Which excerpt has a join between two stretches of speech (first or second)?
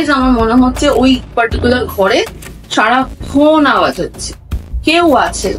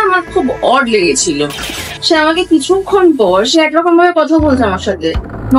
second